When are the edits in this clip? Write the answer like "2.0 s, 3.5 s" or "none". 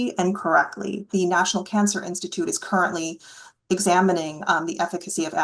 1.1 s